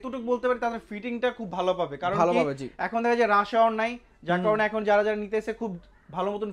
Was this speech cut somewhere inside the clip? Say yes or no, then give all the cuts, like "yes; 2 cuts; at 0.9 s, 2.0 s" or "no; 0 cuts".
no; 0 cuts